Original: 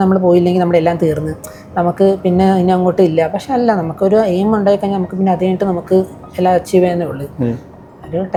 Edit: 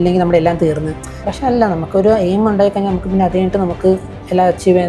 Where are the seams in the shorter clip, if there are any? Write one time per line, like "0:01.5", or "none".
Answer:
0:01.3